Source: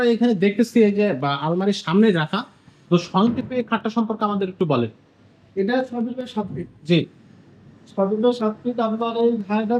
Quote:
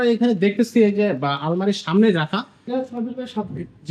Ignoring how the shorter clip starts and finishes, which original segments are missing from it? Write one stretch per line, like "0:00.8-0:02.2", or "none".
0:02.7-0:05.7